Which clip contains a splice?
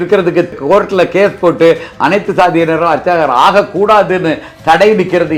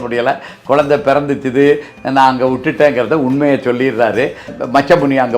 second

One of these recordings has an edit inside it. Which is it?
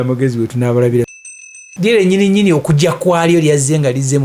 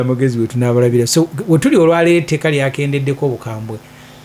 first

